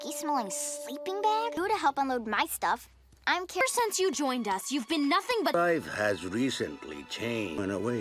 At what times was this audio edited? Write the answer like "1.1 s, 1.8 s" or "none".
5.7 s